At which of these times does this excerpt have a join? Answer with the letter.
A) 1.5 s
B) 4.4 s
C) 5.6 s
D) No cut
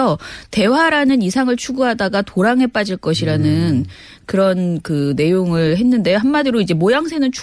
C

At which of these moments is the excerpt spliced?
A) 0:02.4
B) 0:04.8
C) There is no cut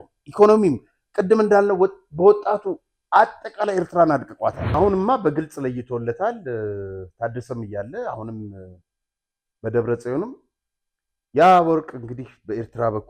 B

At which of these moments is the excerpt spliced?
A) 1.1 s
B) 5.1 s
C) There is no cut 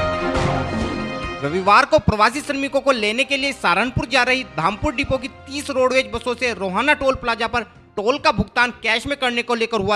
A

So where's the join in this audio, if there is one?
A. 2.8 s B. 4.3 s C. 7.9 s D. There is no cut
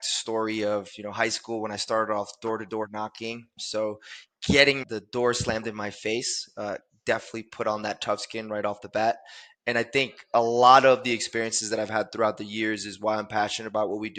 D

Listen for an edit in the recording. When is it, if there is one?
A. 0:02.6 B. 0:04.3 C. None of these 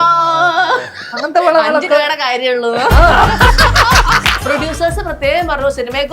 B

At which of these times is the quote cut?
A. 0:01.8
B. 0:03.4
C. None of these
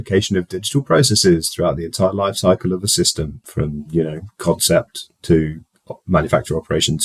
B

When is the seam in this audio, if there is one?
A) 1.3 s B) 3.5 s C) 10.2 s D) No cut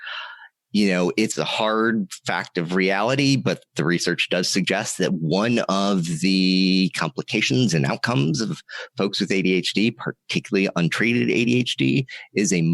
A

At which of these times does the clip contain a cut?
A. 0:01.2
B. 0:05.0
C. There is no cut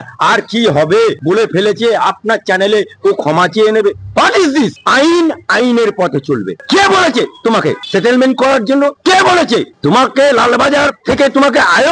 A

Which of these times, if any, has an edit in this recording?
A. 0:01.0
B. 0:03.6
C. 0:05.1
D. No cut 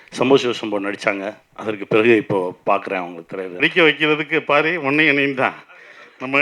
B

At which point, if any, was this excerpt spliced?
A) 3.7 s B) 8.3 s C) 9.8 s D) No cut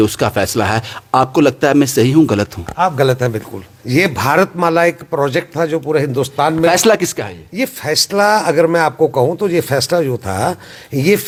D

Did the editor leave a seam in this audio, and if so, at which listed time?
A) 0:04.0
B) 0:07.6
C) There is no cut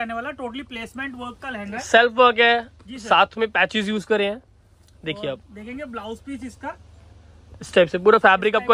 C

